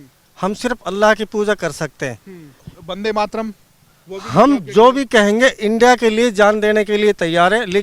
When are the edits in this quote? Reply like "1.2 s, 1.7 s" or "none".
2.6 s